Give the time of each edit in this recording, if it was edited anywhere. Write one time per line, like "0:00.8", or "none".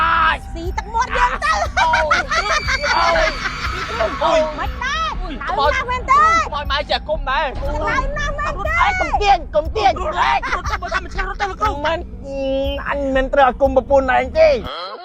none